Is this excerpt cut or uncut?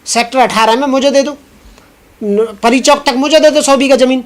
uncut